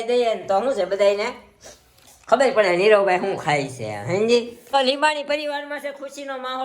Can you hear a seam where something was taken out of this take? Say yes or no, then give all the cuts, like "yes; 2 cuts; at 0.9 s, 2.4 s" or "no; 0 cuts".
yes; 1 cut; at 4.6 s